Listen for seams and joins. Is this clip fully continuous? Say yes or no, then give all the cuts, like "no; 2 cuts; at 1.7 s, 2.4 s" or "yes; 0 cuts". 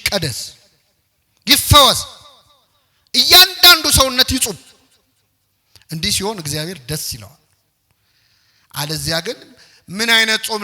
yes; 0 cuts